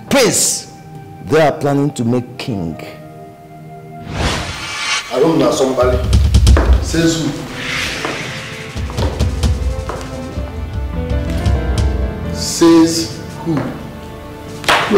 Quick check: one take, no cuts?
no; 1 cut; at 4.1 s

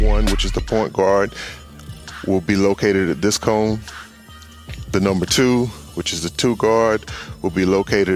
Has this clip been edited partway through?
no; 0 cuts

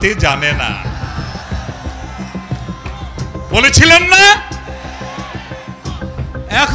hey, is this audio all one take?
yes; 0 cuts

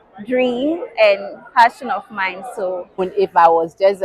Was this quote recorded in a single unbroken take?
no; 1 cut; at 3.1 s

